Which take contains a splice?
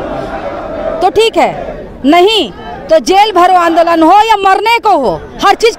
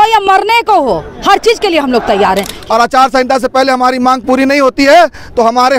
second; 1 cut; at 2.6 s

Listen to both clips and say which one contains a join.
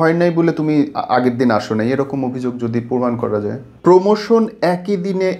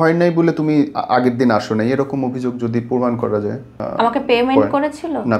first; 1 cut; at 3.6 s

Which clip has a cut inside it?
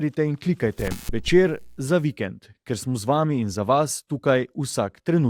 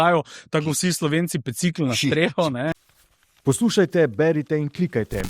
second; 1 cut; at 2.7 s

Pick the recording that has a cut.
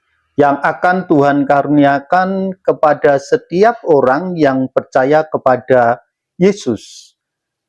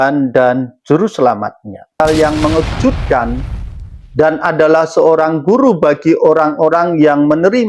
second; 1 cut; at 2.0 s

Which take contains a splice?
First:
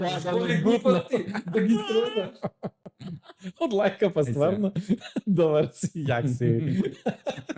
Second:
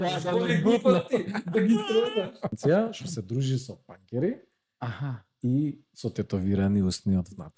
second; 1 cut; at 2.6 s

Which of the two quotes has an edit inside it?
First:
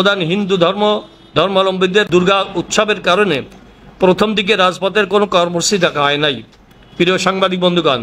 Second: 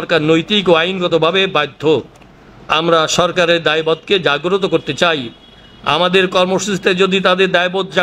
first; 1 cut; at 2.1 s

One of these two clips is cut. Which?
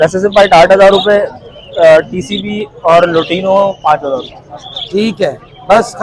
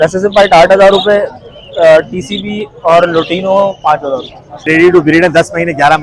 second; 1 cut; at 4.7 s

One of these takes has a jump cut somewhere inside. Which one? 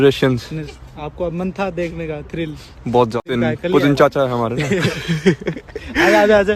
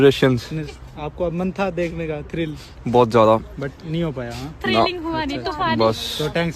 first; 1 cut; at 3.2 s

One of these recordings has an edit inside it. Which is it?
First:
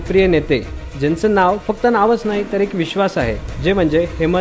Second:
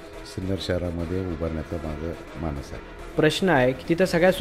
second; 1 cut; at 3.0 s

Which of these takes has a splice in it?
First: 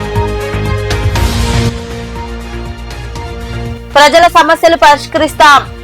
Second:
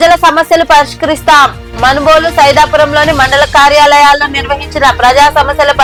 first; 1 cut; at 1.0 s

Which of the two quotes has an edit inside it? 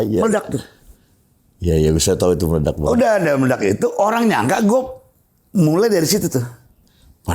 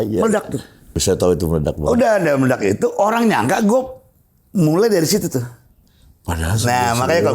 second; 1 cut; at 1.0 s

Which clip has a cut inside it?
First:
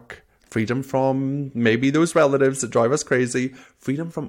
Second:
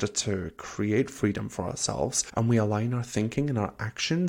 second; 1 cut; at 2.2 s

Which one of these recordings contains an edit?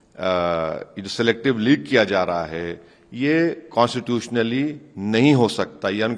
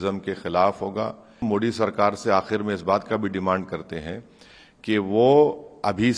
second; 1 cut; at 1.4 s

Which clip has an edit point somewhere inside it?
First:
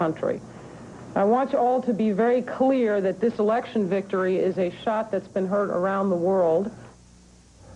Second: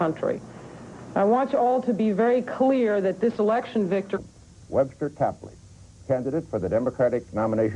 first; 1 cut; at 4.2 s

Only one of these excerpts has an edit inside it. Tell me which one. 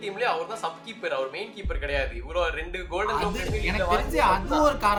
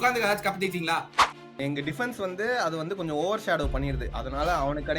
second; 1 cut; at 1.4 s

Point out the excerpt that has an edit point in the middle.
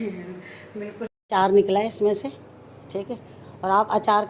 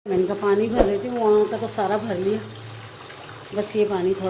first; 1 cut; at 1.1 s

